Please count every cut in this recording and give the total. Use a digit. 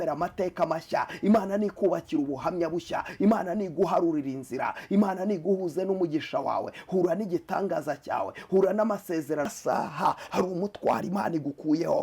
1